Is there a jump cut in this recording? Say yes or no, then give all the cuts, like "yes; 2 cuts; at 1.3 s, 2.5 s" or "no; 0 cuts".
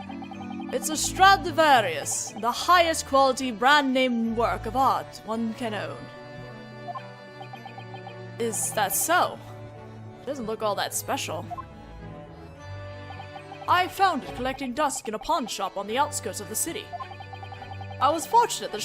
yes; 1 cut; at 6.5 s